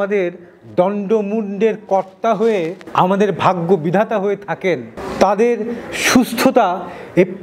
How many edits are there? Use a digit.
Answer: 0